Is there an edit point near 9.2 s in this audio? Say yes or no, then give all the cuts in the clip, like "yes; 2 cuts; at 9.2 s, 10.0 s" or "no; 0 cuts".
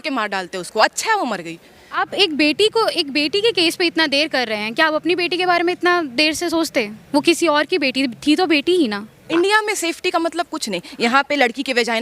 yes; 2 cuts; at 2.0 s, 9.2 s